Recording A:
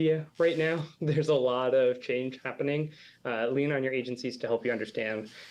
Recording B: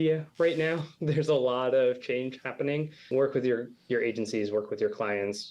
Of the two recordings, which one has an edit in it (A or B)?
B